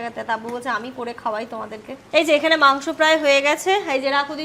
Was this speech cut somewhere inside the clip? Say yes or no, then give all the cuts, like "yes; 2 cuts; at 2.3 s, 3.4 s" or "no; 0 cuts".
yes; 1 cut; at 1.9 s